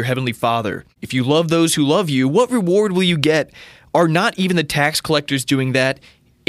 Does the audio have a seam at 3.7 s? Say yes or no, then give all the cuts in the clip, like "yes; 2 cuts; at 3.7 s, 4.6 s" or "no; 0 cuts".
no; 1 cut; at 0.9 s